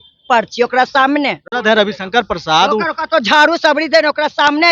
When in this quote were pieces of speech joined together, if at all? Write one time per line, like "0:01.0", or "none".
0:01.4

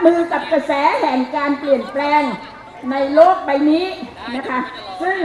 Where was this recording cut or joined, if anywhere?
none

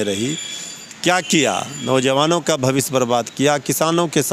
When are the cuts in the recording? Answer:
none

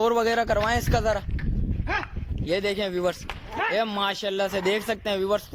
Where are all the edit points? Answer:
none

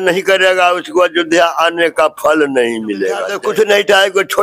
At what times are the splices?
0:03.3

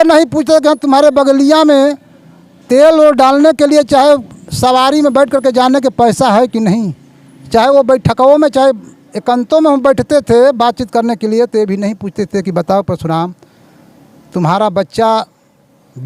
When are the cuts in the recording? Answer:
none

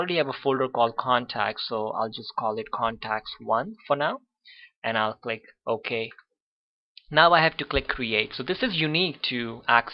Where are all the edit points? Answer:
none

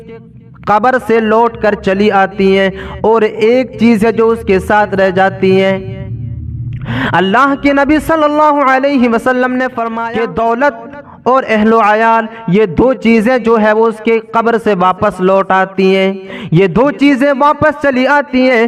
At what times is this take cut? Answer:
0:09.9

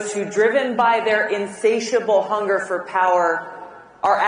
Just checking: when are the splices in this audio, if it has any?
0:02.9

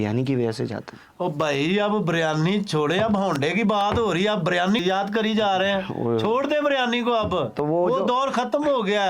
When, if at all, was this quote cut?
0:04.8

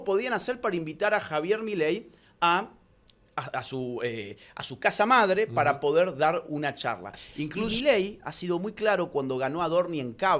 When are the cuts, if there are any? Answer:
0:07.7

